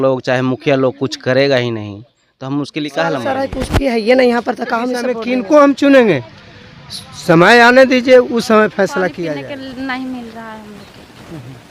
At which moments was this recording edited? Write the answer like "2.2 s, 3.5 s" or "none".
5.2 s, 9.3 s